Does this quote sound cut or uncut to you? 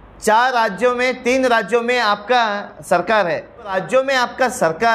cut